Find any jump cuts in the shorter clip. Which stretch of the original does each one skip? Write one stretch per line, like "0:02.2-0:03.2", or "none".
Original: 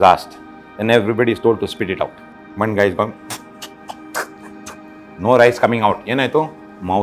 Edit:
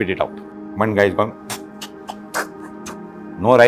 none